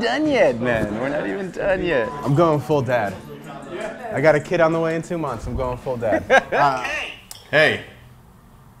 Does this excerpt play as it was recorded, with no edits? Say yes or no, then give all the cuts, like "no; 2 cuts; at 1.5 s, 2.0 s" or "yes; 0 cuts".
no; 2 cuts; at 2.1 s, 6.8 s